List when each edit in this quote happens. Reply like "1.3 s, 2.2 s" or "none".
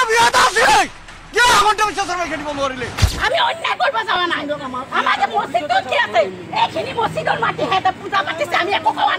3.0 s